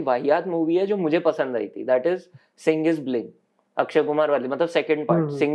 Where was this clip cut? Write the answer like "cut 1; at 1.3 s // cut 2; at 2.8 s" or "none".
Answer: none